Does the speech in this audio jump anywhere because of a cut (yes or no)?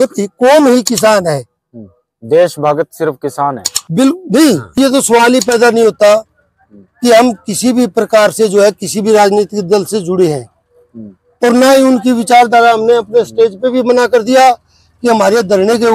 yes